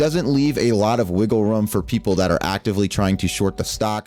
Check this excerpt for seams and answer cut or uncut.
uncut